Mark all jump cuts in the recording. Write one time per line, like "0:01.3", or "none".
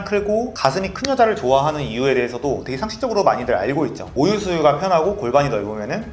none